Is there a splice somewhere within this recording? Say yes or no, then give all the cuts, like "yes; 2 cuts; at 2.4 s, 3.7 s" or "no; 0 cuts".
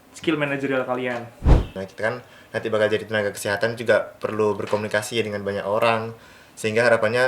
yes; 1 cut; at 1.7 s